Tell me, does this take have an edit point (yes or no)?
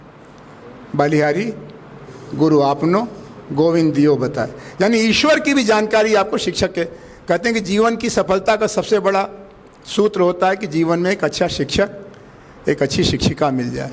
no